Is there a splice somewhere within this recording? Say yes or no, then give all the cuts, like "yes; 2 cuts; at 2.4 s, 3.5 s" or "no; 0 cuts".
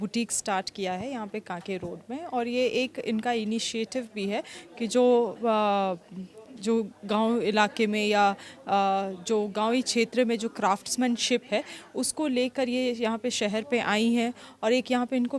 no; 0 cuts